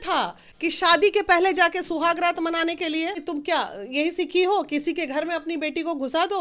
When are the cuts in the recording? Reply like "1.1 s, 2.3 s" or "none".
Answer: 3.2 s